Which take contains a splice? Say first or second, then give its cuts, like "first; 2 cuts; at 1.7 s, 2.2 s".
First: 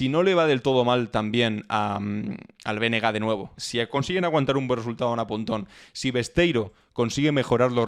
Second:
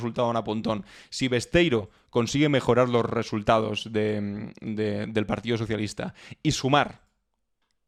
first; 1 cut; at 3.6 s